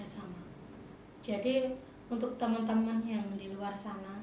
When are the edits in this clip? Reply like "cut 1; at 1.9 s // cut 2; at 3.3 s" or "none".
cut 1; at 1.0 s

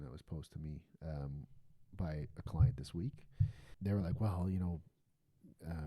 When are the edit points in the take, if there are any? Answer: cut 1; at 3.6 s

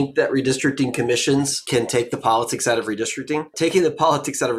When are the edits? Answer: cut 1; at 1.6 s // cut 2; at 3.5 s

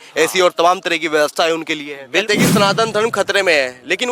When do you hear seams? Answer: cut 1; at 2.2 s

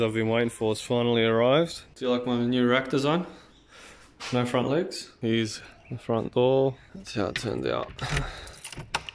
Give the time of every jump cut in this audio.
cut 1; at 1.9 s // cut 2; at 5.1 s // cut 3; at 6.9 s

